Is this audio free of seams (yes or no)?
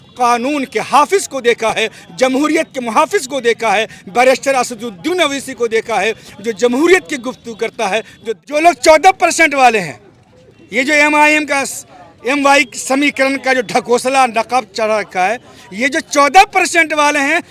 no